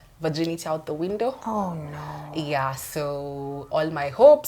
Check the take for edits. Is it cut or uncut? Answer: uncut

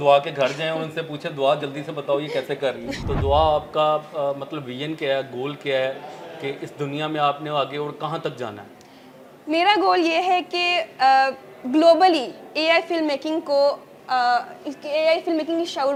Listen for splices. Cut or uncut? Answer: uncut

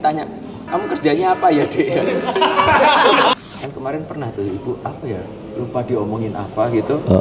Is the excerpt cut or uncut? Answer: cut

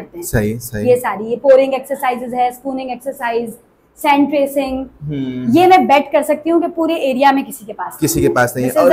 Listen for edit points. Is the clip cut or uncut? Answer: uncut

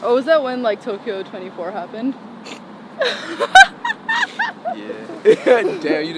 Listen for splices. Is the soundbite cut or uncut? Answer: uncut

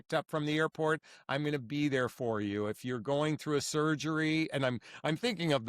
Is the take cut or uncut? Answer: uncut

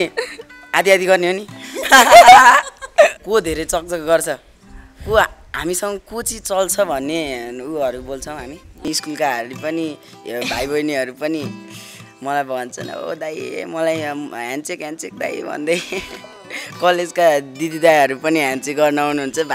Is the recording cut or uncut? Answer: cut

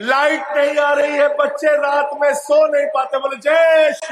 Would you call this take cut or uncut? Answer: uncut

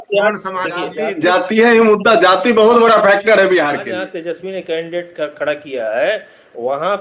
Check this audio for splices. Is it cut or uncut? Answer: cut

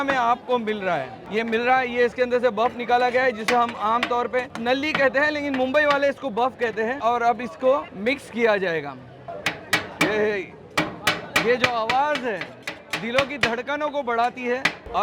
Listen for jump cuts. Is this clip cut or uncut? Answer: uncut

